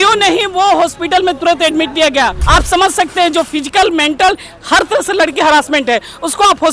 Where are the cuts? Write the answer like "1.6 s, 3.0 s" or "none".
2.4 s